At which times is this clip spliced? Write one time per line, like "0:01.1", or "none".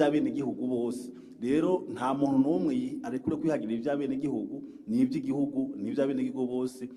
none